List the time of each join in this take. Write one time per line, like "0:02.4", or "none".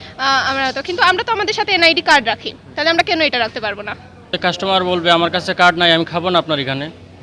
0:04.3